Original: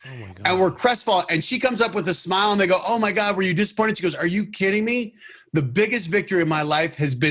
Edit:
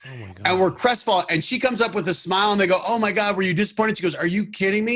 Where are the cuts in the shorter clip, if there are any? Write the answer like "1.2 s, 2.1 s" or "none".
none